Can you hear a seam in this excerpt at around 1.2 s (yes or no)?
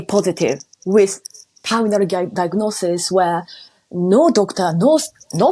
no